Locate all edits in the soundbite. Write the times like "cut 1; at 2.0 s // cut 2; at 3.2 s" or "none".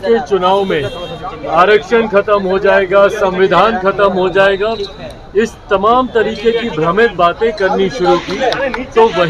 none

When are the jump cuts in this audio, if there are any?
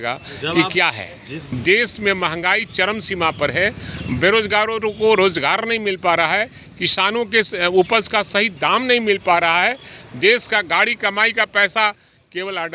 cut 1; at 1.4 s

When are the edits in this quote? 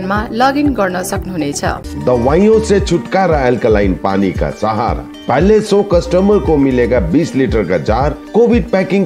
cut 1; at 1.9 s

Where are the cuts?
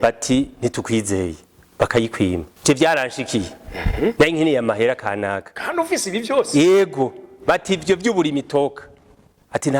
cut 1; at 2.5 s

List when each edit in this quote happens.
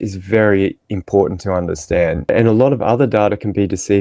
cut 1; at 2.3 s

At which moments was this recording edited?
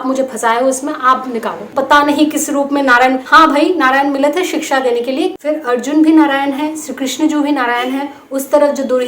cut 1; at 1.7 s // cut 2; at 3.2 s // cut 3; at 5.4 s

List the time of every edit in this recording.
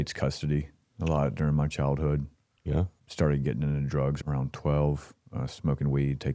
cut 1; at 3.0 s // cut 2; at 4.2 s

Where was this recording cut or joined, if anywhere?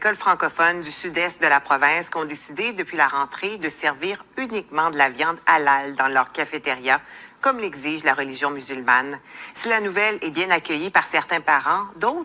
cut 1; at 9.9 s

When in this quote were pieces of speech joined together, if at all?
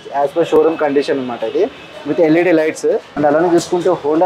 cut 1; at 3.1 s

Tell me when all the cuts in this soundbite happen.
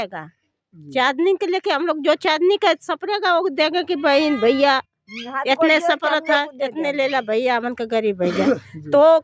none

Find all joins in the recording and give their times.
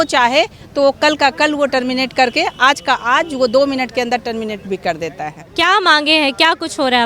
cut 1; at 5.5 s

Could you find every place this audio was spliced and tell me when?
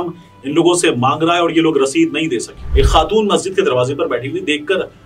cut 1; at 2.6 s

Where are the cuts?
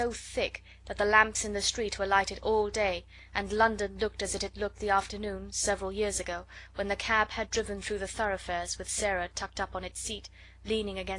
none

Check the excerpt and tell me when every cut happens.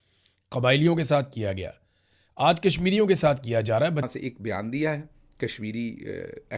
cut 1; at 4.0 s

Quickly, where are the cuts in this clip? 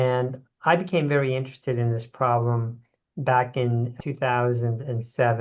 cut 1; at 3.9 s

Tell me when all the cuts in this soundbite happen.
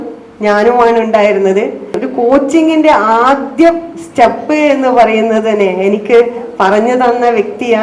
cut 1; at 2.0 s

